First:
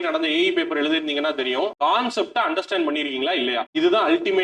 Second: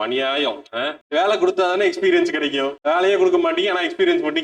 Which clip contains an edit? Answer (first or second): second